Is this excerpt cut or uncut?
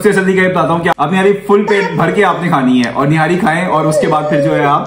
cut